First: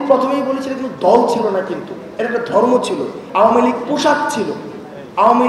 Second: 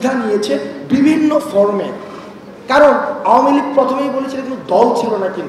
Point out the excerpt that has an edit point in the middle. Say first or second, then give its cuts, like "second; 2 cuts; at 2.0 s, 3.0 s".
first; 1 cut; at 3.2 s